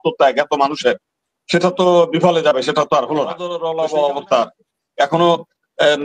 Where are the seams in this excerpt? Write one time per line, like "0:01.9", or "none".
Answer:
0:03.5